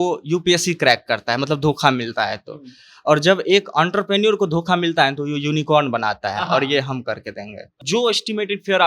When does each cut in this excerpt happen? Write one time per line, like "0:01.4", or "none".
0:07.8